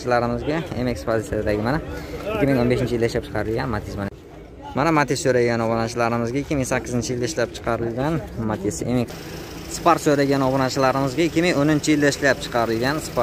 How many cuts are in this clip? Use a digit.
2